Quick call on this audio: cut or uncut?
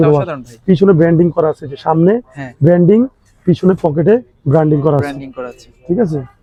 uncut